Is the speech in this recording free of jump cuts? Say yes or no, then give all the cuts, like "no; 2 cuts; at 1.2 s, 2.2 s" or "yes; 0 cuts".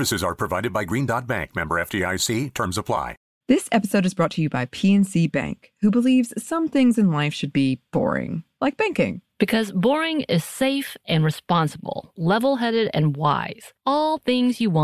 no; 1 cut; at 3.2 s